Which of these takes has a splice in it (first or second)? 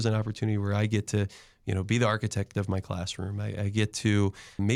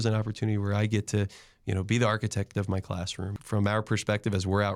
second